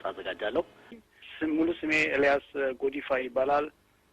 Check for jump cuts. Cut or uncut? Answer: cut